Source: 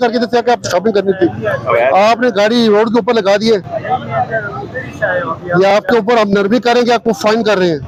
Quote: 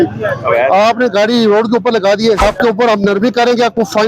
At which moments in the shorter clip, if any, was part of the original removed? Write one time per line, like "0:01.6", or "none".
0:02.4